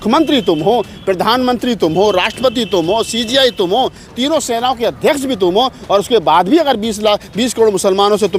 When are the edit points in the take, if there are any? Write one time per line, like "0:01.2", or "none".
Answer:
none